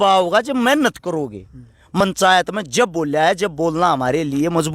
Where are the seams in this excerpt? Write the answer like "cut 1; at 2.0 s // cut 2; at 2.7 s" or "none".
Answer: cut 1; at 2.0 s